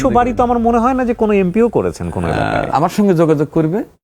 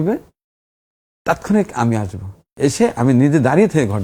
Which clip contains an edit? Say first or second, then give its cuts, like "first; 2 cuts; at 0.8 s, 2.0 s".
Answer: first; 1 cut; at 2.7 s